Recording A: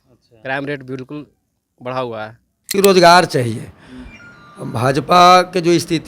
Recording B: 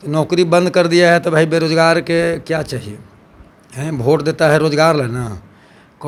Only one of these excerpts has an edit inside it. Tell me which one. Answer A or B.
A